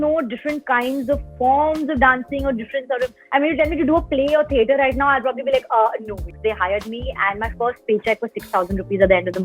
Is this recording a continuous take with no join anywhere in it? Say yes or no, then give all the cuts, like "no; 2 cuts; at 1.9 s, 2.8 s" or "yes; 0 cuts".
no; 2 cuts; at 3.2 s, 6.3 s